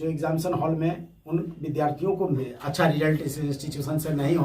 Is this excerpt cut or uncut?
cut